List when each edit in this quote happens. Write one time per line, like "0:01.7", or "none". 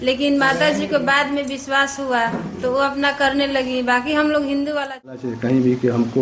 0:05.2